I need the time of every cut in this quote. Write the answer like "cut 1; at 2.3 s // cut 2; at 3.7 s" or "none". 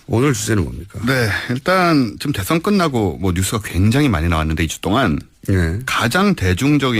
cut 1; at 6.0 s